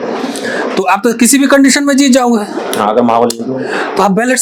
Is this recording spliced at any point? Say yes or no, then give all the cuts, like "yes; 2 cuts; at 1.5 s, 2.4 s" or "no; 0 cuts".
no; 0 cuts